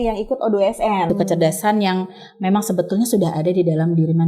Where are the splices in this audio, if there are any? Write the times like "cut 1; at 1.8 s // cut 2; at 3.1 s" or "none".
cut 1; at 1.1 s